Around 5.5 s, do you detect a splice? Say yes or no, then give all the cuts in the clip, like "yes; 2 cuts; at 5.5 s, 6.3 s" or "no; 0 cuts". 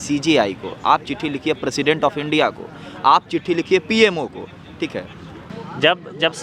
yes; 1 cut; at 5.5 s